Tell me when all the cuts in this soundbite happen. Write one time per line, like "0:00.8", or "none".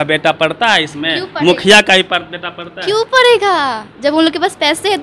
none

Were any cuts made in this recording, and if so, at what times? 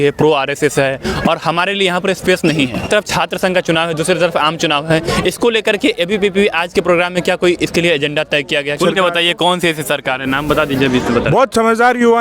0:02.8
0:08.8

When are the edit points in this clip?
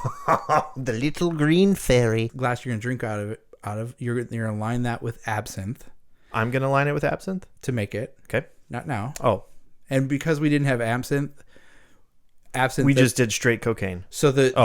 0:02.3

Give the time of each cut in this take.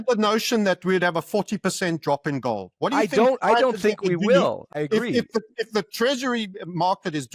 0:04.6

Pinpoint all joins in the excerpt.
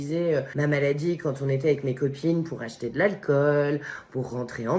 none

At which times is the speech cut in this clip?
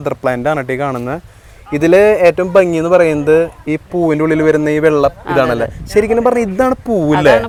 none

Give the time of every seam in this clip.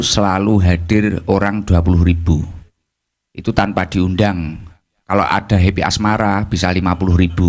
none

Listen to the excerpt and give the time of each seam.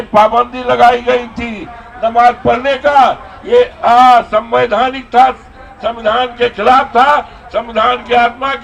none

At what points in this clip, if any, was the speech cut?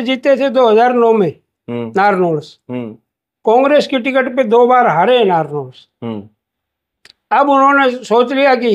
none

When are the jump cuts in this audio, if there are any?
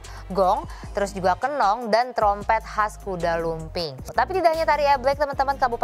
0:04.0

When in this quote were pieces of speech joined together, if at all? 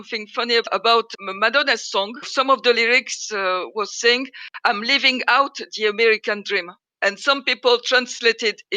none

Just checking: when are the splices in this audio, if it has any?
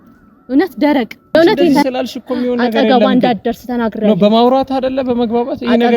0:01.3

